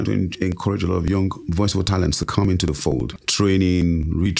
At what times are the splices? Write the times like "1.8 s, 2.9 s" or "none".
1.4 s, 3.1 s